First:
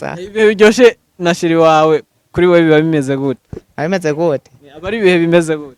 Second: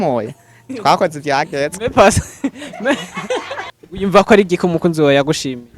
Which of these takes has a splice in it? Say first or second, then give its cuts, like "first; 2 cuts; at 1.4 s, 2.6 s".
second; 1 cut; at 3.7 s